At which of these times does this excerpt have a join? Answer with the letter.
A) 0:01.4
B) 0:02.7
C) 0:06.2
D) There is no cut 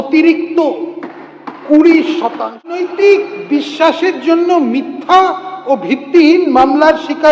B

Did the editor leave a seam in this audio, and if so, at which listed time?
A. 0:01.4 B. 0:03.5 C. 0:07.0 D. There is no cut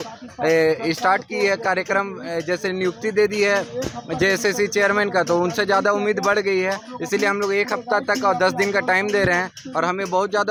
D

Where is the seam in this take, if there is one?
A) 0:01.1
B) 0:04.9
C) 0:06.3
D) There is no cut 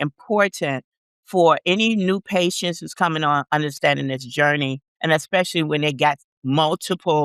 D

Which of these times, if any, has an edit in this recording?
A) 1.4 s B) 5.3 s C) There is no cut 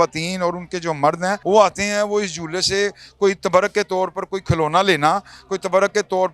A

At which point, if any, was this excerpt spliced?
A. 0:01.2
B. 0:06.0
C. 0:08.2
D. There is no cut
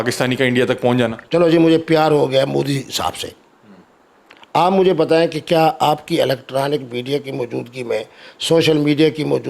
A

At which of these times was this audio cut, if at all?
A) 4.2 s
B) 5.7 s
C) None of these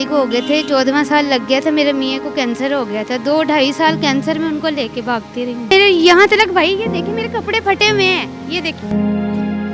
B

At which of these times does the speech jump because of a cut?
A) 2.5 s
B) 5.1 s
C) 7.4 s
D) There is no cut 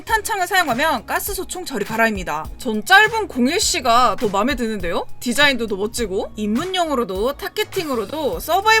A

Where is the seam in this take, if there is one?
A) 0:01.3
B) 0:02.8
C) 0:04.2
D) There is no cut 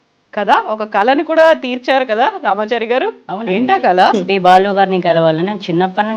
C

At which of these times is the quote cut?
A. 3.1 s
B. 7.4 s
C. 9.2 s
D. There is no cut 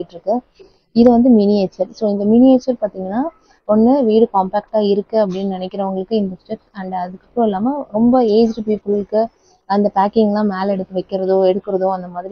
D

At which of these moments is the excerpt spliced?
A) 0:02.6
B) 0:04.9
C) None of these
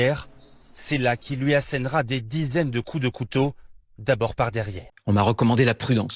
B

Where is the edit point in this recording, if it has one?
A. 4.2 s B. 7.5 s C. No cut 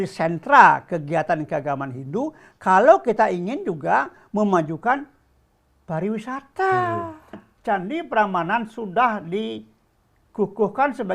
B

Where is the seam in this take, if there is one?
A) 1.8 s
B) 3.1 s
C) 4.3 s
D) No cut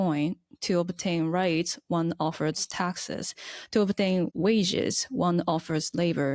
C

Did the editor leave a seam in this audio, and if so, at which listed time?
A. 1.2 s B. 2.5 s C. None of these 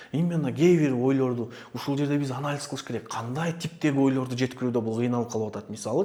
C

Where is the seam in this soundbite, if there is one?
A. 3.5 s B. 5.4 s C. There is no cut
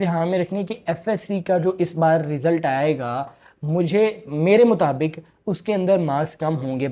C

